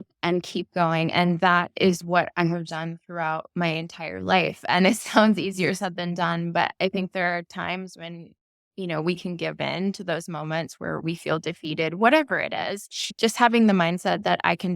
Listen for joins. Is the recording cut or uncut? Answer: cut